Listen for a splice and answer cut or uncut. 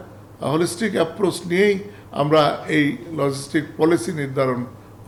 uncut